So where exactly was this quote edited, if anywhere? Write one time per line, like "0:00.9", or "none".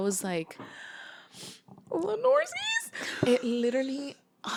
none